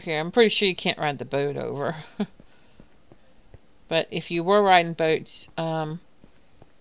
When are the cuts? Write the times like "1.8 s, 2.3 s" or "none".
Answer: 4.1 s